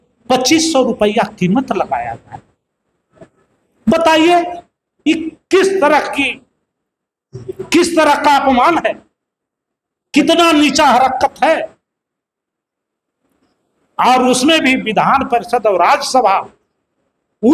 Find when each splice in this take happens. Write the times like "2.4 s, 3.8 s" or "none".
none